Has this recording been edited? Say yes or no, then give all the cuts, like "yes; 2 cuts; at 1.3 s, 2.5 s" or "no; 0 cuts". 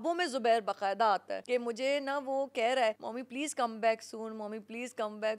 yes; 2 cuts; at 1.3 s, 3.1 s